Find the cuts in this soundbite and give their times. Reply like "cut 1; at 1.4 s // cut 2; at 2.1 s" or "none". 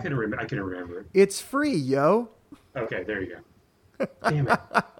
none